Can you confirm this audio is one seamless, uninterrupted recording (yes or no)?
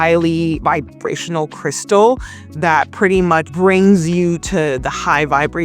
yes